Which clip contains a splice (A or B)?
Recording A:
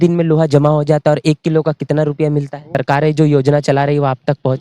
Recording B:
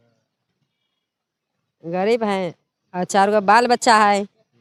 A